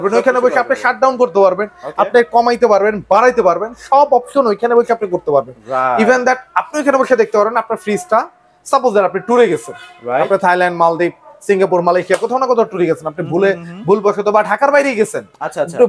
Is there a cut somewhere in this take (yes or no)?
no